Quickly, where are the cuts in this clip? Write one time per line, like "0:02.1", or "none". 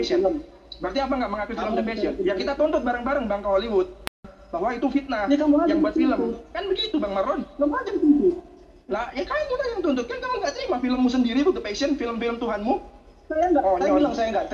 0:04.4
0:10.3

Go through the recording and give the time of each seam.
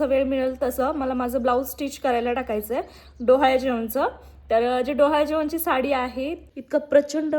0:06.4

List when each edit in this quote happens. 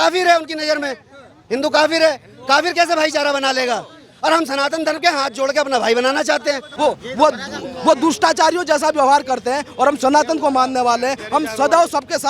0:06.7

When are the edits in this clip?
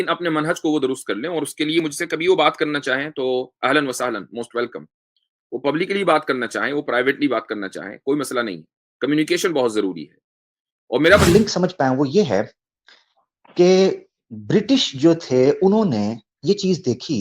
0:11.3

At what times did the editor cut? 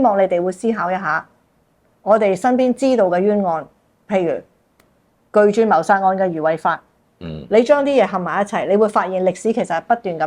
none

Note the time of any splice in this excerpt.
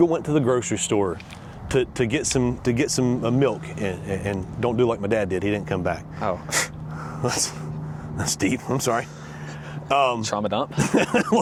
none

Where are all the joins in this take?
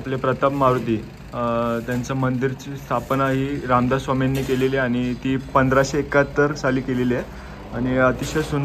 none

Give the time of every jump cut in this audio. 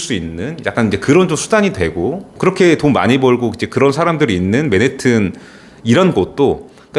0:02.3

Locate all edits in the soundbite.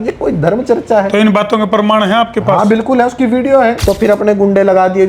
0:03.8

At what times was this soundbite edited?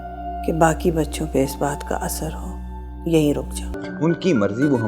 0:03.8

